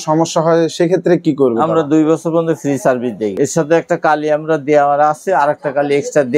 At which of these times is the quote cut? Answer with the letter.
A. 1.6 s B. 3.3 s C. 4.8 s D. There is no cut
B